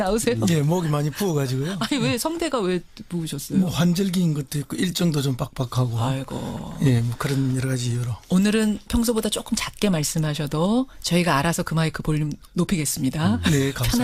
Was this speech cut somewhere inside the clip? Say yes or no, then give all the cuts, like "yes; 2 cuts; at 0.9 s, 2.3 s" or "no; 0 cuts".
no; 0 cuts